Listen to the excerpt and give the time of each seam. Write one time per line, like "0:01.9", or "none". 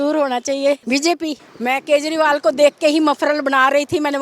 0:01.1